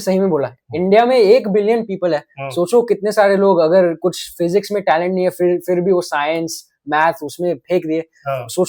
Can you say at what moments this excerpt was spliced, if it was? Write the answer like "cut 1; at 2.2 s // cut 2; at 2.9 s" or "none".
none